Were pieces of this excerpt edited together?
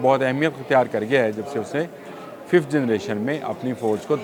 no; 0 cuts

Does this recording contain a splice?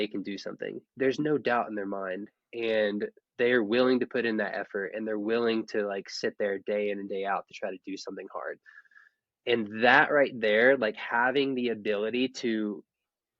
yes; 2 cuts; at 0.9 s, 8.6 s

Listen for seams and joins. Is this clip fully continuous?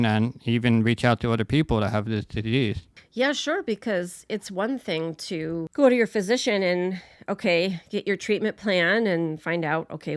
yes; 0 cuts

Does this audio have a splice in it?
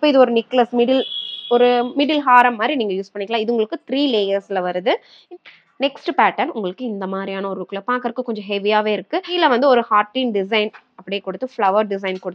yes; 2 cuts; at 5.1 s, 9.4 s

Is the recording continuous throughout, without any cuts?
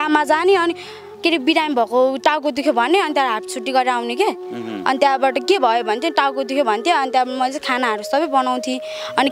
yes; 0 cuts

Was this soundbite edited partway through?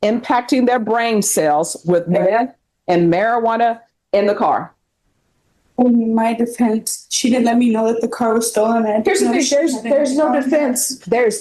no; 0 cuts

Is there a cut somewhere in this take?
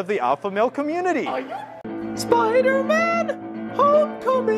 yes; 1 cut; at 1.9 s

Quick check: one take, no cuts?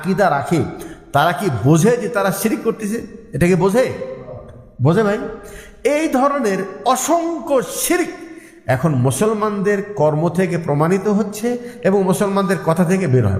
yes; 0 cuts

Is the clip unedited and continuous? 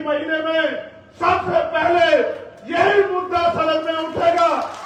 yes; 0 cuts

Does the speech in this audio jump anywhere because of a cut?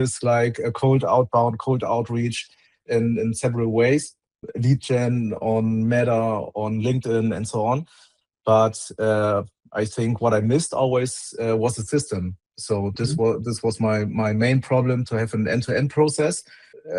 no; 0 cuts

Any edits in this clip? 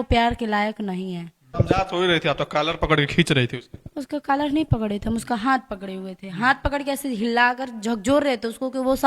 yes; 1 cut; at 1.5 s

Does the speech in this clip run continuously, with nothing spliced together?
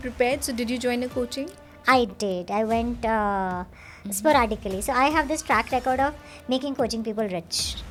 yes; 0 cuts

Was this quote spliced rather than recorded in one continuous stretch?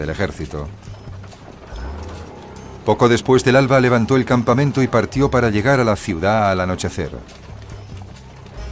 no; 0 cuts

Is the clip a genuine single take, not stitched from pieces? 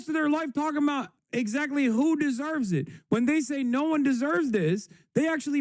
no; 1 cut; at 1.2 s

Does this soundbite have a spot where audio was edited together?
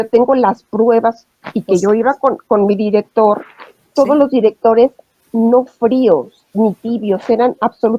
no; 0 cuts

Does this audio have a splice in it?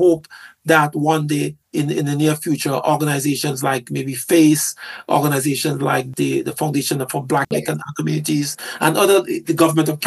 yes; 3 cuts; at 1.6 s, 6.1 s, 7.5 s

